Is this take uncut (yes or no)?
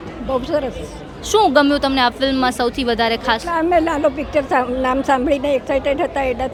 yes